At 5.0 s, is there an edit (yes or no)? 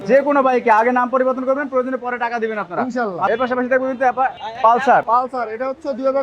yes